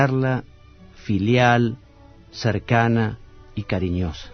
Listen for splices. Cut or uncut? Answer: cut